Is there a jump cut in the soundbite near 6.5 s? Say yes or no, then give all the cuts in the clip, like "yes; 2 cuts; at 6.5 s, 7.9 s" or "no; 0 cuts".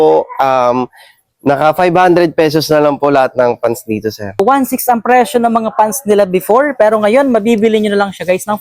no; 1 cut; at 4.4 s